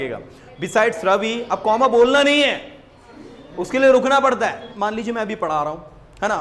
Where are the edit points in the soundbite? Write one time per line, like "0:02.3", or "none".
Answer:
0:04.7